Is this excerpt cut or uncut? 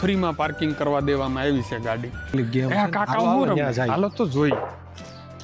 cut